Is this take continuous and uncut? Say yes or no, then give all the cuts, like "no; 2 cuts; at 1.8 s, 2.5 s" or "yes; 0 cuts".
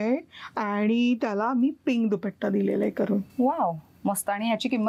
yes; 0 cuts